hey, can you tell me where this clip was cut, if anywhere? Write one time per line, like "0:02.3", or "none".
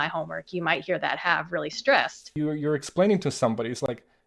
0:02.3